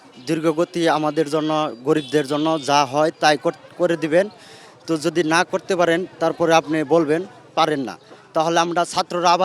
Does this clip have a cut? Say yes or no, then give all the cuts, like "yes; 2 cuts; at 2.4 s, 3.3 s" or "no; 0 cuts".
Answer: no; 0 cuts